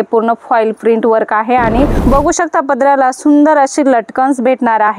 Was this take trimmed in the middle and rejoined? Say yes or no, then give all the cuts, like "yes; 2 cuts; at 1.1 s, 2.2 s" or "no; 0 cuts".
yes; 1 cut; at 2.0 s